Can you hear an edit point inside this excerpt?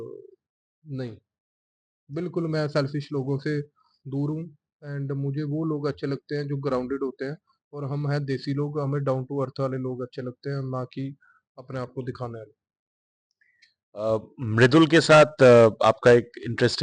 no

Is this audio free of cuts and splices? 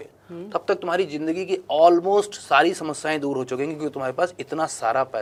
yes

